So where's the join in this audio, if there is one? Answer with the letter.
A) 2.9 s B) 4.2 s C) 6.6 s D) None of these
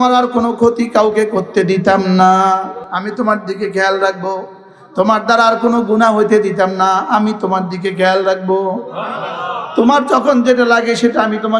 A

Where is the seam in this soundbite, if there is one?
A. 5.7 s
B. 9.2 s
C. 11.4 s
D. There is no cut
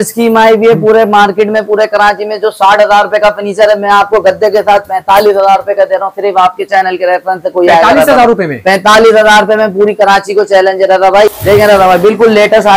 C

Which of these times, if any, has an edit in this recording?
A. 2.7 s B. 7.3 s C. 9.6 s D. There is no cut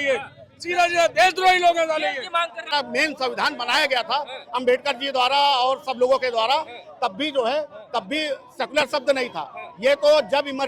A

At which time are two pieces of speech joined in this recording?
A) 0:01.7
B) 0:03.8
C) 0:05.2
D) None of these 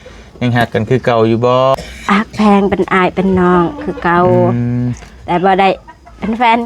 A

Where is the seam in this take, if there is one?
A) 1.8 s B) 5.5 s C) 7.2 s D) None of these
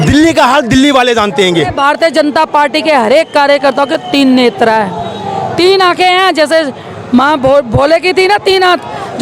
A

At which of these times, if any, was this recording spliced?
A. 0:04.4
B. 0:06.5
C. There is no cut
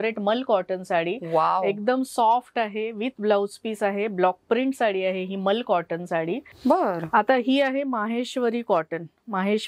B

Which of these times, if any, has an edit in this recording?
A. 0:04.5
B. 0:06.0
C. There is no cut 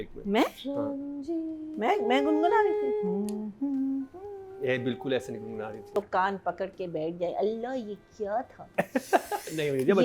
B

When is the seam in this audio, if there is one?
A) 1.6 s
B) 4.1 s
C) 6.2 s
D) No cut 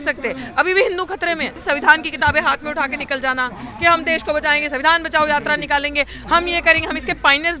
A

